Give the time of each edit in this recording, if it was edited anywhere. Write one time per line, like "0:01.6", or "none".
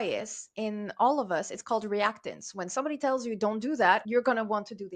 0:04.0